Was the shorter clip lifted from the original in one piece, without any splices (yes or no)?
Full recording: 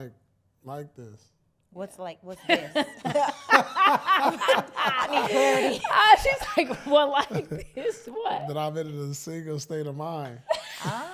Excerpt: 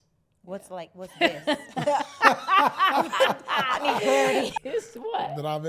no